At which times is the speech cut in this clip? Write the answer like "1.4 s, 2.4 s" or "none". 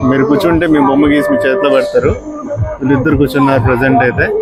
none